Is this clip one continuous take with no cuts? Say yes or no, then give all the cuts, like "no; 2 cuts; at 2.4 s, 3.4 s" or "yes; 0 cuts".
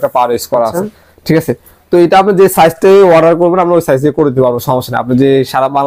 yes; 0 cuts